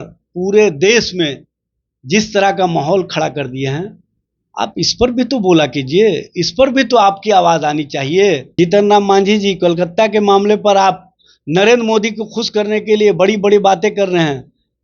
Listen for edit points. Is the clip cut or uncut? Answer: cut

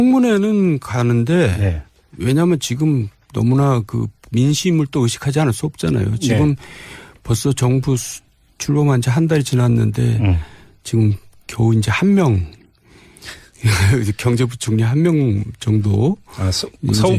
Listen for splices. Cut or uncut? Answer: cut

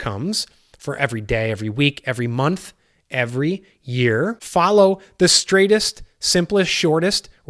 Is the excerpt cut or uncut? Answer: cut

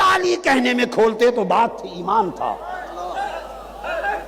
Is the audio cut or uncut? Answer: uncut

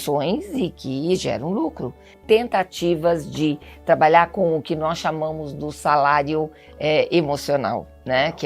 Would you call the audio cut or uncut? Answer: cut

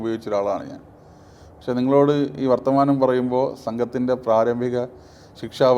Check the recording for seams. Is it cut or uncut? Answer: uncut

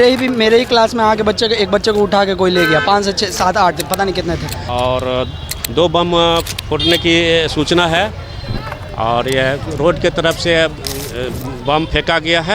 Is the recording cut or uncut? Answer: cut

